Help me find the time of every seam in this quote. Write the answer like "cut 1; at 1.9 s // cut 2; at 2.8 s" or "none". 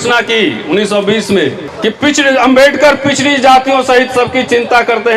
cut 1; at 1.7 s